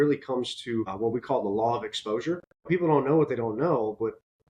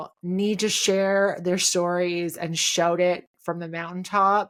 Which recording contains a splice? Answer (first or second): first